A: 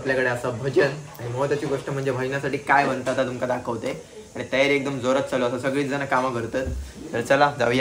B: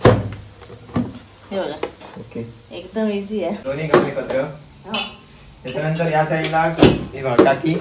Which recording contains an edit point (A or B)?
B